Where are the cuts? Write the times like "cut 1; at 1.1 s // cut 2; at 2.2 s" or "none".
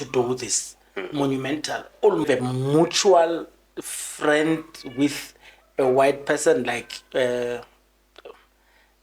cut 1; at 2.2 s

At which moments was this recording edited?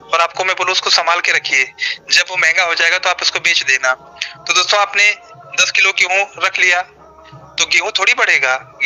none

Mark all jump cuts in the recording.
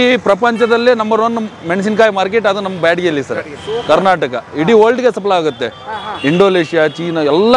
none

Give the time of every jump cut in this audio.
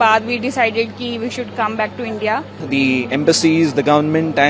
cut 1; at 2.5 s

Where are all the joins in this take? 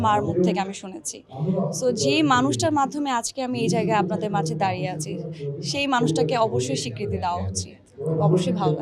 none

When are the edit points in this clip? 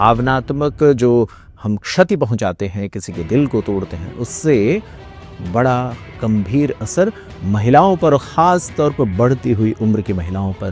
none

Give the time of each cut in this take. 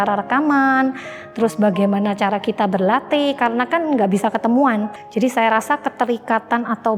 cut 1; at 5.0 s

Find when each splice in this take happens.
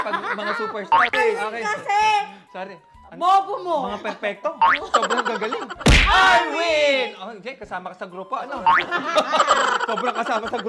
cut 1; at 1.1 s

